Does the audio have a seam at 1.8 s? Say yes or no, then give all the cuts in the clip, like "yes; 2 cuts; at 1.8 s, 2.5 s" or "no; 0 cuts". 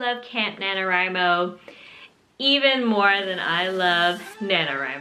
no; 0 cuts